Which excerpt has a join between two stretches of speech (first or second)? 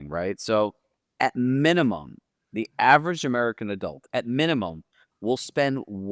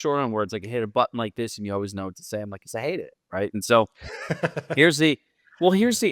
second